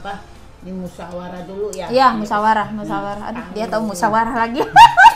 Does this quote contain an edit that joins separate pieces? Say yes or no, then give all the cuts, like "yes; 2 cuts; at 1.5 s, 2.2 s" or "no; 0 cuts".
no; 0 cuts